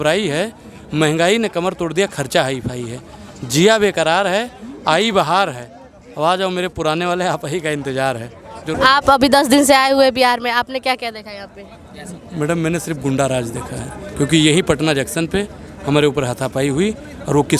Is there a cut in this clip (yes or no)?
yes